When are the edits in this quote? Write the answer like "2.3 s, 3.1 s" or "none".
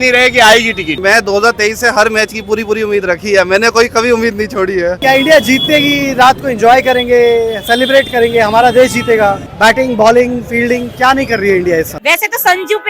1.0 s, 5.0 s, 9.5 s, 11.9 s